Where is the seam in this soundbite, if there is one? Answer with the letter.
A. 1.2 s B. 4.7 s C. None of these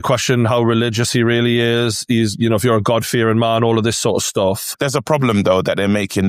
B